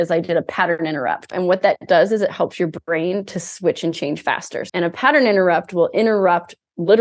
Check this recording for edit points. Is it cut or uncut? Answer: cut